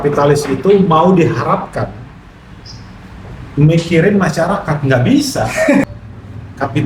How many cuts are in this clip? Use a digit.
1